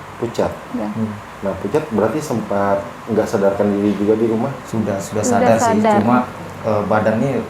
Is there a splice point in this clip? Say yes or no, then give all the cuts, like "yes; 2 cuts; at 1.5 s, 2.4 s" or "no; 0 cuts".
yes; 2 cuts; at 1.3 s, 4.6 s